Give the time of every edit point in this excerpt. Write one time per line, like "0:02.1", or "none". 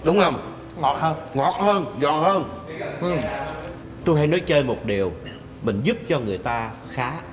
0:03.7